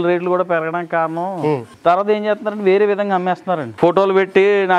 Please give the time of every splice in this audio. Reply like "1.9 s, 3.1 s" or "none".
1.7 s, 3.7 s